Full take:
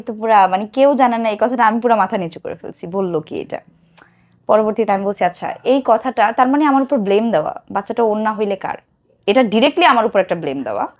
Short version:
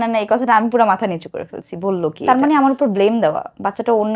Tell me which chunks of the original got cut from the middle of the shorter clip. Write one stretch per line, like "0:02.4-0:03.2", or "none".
0:03.3-0:06.3